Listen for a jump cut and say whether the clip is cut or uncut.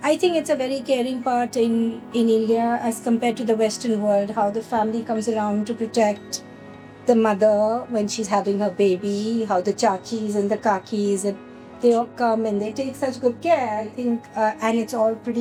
uncut